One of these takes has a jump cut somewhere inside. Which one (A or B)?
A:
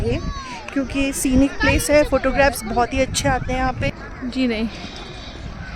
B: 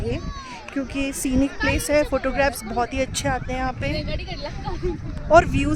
A